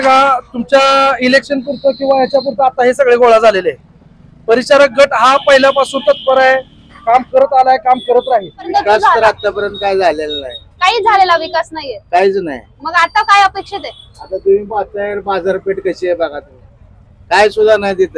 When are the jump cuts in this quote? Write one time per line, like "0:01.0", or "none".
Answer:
0:08.7